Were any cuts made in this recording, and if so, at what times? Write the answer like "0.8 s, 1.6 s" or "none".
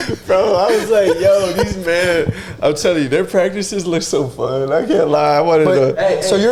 none